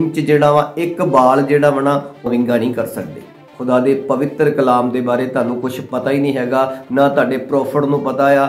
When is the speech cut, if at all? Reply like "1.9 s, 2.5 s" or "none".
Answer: 2.3 s, 3.5 s